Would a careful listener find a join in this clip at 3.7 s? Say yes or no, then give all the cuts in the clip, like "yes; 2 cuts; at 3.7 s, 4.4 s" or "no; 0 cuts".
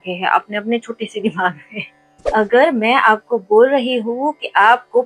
no; 1 cut; at 2.3 s